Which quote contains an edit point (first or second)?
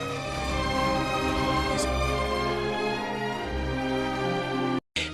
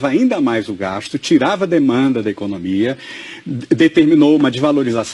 second